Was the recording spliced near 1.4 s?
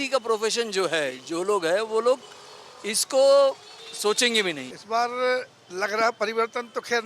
no; 1 cut; at 4.7 s

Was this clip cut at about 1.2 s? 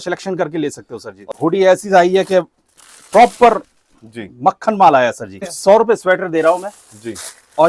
yes; 2 cuts; at 1.2 s, 5.5 s

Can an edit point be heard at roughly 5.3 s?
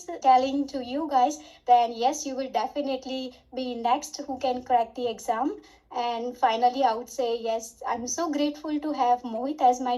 no; 0 cuts

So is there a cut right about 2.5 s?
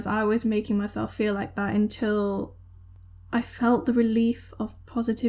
no; 0 cuts

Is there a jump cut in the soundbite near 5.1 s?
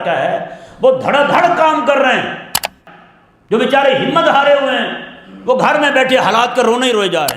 no; 1 cut; at 2.8 s

